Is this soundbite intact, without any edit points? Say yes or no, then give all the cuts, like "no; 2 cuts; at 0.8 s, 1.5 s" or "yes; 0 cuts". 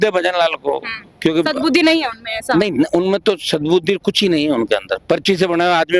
yes; 0 cuts